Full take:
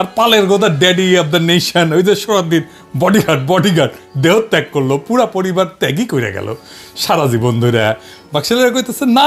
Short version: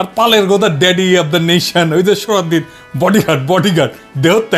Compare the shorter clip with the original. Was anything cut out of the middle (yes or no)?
no